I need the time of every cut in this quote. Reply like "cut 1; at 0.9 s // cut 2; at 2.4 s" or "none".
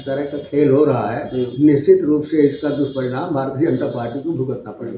none